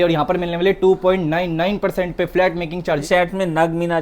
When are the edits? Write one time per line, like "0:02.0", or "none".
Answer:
0:03.1